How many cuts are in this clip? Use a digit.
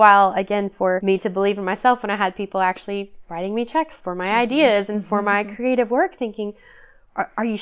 1